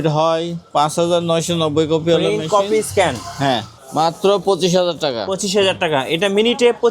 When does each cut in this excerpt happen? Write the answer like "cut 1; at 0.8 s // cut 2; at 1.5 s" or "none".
cut 1; at 3.8 s